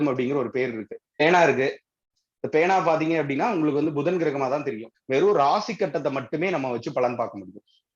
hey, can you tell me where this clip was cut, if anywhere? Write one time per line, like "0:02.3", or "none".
0:01.2
0:04.9